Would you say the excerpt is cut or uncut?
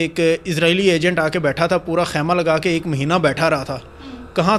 uncut